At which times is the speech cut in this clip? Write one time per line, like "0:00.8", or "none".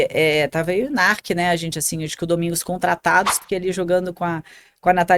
0:03.4

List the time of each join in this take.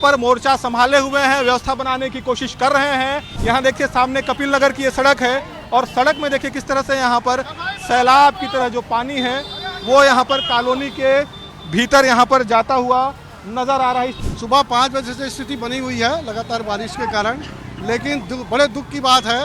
0:03.3
0:14.2

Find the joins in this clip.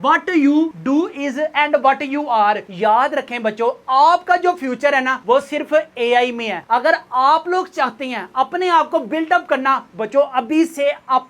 0:02.7

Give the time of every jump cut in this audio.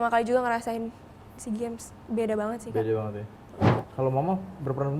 0:03.8

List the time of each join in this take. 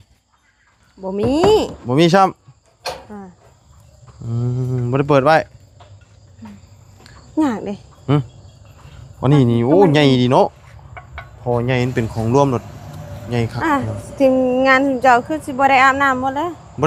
none

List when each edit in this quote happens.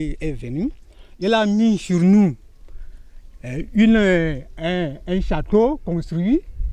none

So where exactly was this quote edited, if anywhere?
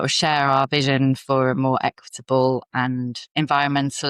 0:03.2

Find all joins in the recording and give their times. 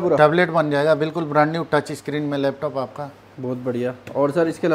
none

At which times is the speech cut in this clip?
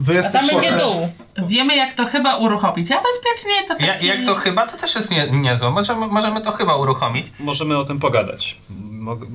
0:01.2
0:07.3

